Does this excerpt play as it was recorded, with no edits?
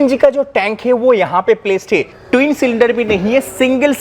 no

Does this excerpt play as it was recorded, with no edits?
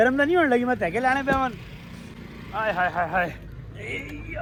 yes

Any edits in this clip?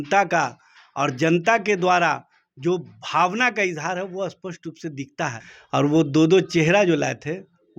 yes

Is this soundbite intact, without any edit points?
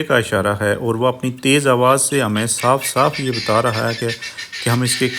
yes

